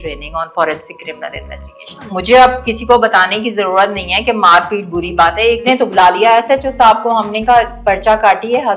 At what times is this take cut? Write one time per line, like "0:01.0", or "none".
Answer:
0:02.1
0:05.6